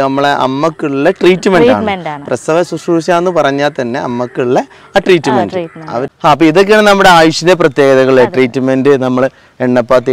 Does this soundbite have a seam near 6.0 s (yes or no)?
yes